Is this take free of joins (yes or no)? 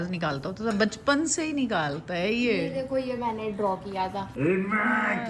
no